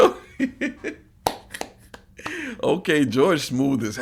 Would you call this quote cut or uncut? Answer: uncut